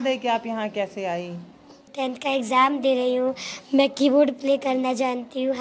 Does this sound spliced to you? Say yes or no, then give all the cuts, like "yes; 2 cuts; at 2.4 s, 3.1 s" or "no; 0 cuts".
yes; 1 cut; at 1.9 s